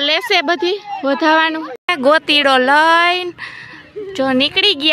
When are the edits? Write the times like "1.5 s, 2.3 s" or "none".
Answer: 1.9 s